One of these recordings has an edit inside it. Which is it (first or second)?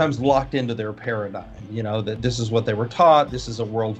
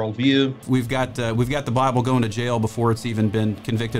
second